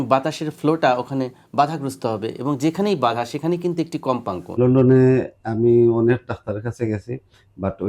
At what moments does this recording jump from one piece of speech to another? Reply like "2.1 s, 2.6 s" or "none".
4.4 s